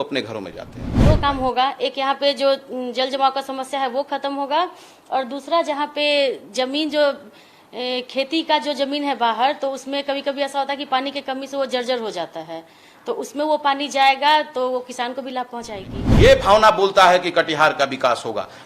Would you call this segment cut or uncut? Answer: cut